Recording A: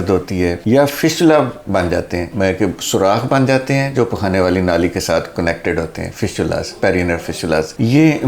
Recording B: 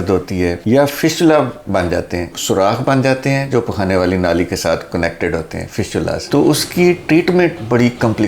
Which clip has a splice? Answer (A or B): B